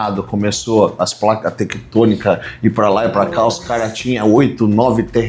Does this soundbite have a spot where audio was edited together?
no; 0 cuts

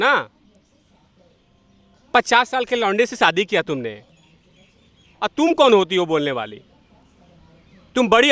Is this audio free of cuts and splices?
no; 1 cut; at 4.0 s

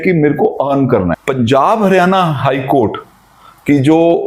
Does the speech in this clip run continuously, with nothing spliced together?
no; 1 cut; at 1.2 s

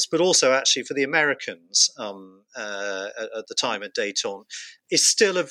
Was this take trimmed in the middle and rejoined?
no; 0 cuts

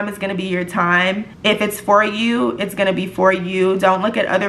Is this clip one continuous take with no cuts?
no; 1 cut; at 1.3 s

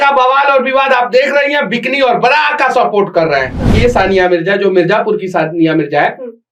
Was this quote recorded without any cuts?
no; 1 cut; at 3.7 s

